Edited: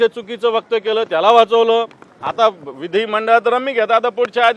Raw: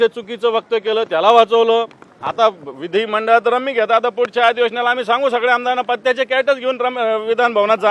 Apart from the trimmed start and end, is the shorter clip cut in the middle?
no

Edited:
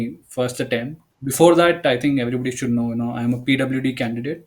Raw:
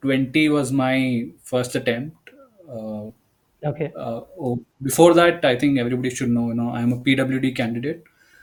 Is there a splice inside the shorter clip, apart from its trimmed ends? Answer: yes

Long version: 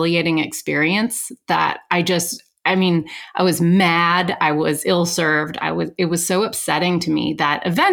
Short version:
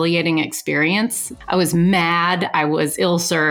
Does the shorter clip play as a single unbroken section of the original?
no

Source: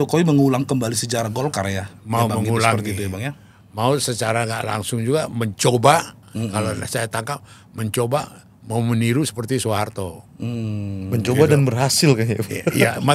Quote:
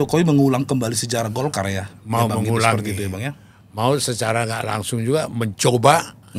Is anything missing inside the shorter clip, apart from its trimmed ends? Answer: no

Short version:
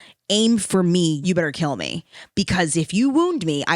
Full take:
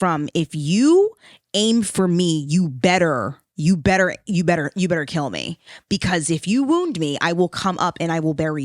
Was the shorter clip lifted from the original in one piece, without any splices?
no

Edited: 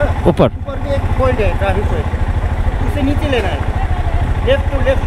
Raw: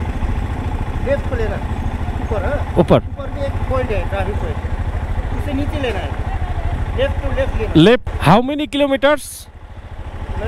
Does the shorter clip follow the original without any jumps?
yes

